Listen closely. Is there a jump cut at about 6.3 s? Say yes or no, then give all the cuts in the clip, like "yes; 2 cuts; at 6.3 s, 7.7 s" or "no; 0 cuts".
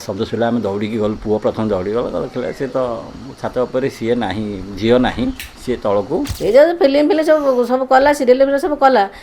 yes; 1 cut; at 6.3 s